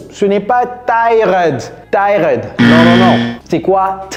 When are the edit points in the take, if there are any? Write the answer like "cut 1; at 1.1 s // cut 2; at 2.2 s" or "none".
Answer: none

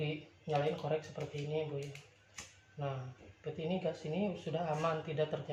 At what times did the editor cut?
none

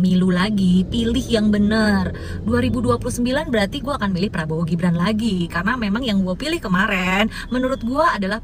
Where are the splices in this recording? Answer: none

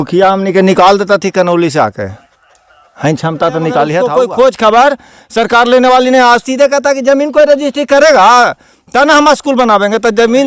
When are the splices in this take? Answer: cut 1; at 4.1 s

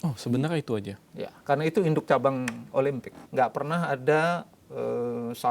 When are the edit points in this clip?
cut 1; at 3.1 s

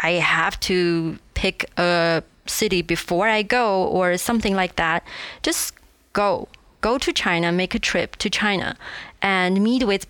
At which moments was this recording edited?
none

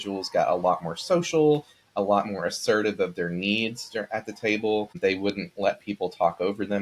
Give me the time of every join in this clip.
cut 1; at 4.9 s

